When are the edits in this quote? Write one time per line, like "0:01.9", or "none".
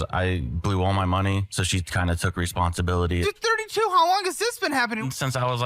0:01.5